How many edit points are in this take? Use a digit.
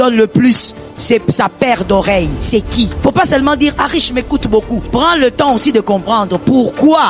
2